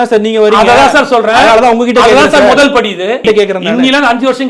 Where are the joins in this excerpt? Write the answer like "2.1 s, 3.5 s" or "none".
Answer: 3.2 s